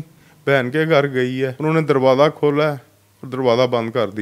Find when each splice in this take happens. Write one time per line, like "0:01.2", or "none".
0:01.6

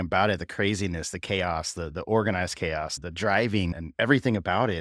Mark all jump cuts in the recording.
0:02.9
0:03.8

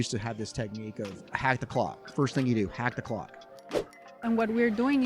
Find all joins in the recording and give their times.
0:01.2
0:03.9

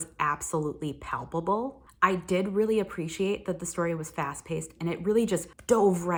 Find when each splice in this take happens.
none

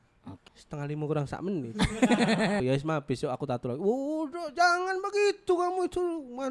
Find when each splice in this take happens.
0:02.6

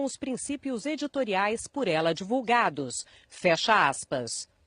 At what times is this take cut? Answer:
0:02.0

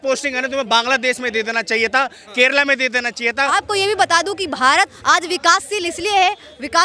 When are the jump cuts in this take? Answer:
0:03.5
0:05.0

